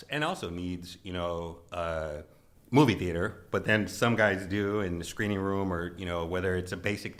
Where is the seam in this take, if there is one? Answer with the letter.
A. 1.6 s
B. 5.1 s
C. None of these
C